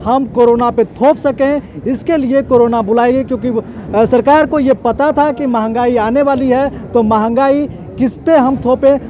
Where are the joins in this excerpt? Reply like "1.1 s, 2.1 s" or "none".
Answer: none